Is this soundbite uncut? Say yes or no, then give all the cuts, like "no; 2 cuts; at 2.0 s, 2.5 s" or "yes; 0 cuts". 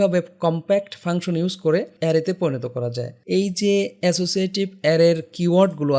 no; 2 cuts; at 1.9 s, 3.1 s